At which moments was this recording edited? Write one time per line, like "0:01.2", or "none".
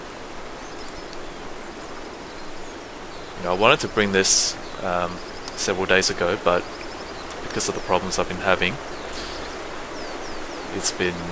none